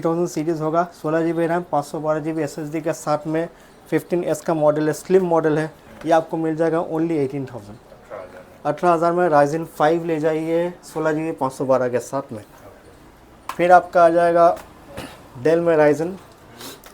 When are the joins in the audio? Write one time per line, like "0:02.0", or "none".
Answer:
none